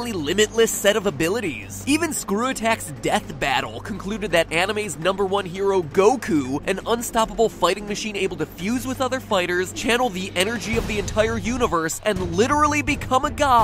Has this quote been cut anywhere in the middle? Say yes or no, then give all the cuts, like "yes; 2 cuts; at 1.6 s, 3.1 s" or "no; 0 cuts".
yes; 1 cut; at 2.2 s